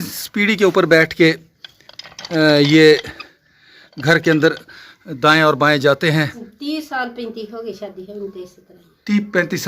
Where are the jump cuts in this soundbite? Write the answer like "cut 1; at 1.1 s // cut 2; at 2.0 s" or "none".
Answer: cut 1; at 6.5 s